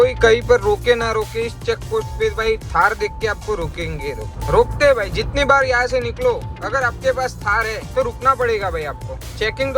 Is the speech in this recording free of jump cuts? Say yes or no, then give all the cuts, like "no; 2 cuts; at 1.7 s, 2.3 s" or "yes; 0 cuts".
no; 1 cut; at 4.4 s